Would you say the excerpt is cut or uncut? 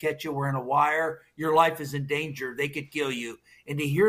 uncut